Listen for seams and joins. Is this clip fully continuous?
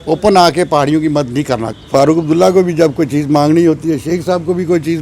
no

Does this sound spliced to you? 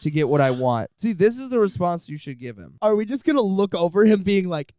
yes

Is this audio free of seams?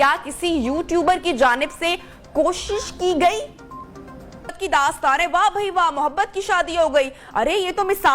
no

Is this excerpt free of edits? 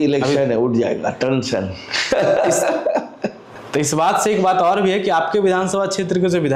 yes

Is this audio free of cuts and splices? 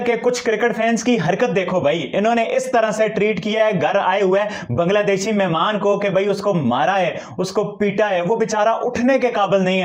yes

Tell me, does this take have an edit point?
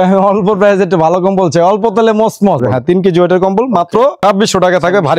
yes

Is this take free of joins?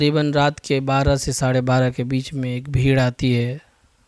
yes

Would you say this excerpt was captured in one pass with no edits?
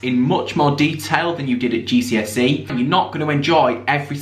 no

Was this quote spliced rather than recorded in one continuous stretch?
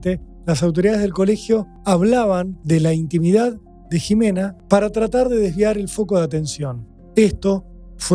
yes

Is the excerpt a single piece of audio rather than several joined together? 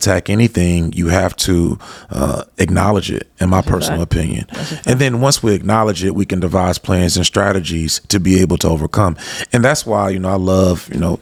yes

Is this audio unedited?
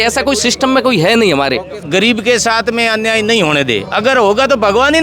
no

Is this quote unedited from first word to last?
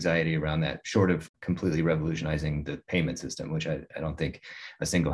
no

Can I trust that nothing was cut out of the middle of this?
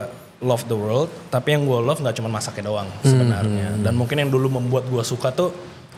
yes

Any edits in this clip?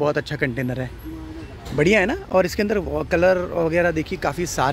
no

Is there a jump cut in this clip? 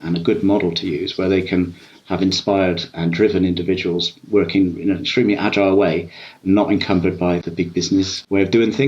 yes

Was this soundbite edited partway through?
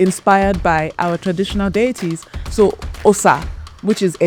no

